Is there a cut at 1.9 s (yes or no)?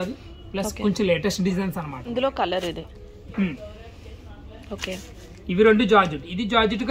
yes